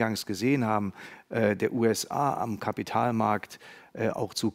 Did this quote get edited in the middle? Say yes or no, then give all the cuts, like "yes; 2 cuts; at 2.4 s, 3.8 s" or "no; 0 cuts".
no; 0 cuts